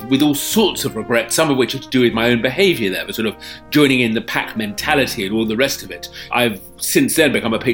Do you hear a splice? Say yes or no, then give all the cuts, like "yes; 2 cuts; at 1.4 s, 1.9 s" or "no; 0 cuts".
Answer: yes; 1 cut; at 6.3 s